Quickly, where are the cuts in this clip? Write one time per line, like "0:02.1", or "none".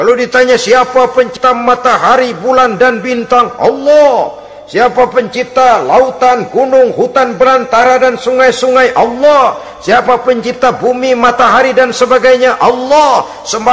0:01.3